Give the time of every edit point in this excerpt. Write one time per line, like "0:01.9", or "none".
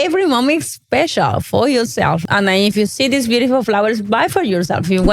0:02.2